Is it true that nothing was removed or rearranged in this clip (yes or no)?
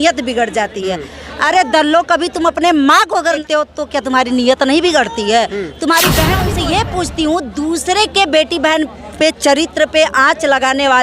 no